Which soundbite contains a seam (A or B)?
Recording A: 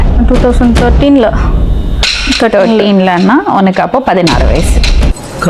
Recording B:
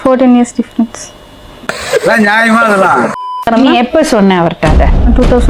B